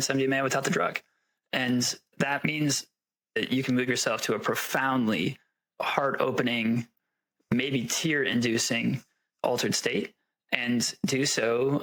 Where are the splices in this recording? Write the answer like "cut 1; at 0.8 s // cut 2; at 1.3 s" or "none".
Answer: none